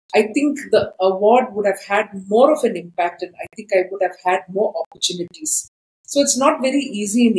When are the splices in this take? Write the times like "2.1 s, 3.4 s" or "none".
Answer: none

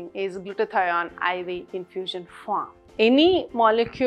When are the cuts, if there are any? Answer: 2.8 s

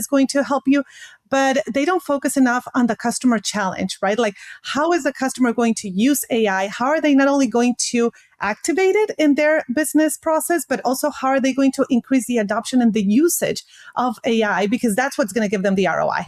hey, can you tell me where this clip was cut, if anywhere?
none

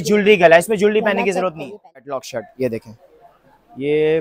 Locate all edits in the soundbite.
2.4 s

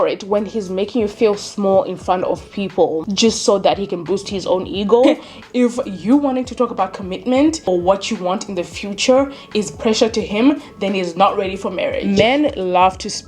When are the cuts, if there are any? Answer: 3.1 s, 5.0 s, 7.7 s, 12.0 s

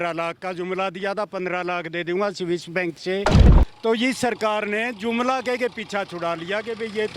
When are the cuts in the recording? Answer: 3.5 s

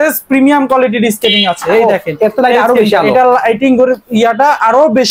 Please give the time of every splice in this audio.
none

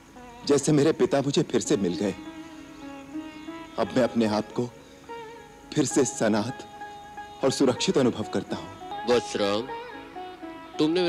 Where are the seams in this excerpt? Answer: 9.0 s

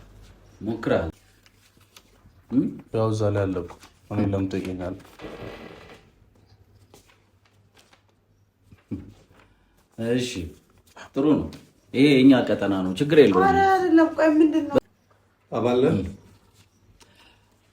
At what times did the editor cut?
1.1 s, 14.8 s

